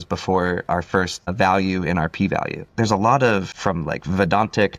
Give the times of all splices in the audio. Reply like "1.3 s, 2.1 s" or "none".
1.3 s, 2.6 s, 3.5 s